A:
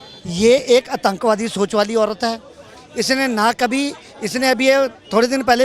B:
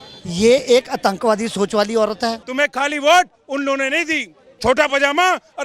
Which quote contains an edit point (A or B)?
B